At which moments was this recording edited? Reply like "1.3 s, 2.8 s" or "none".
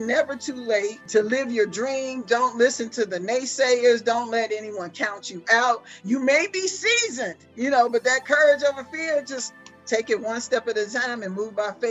1.0 s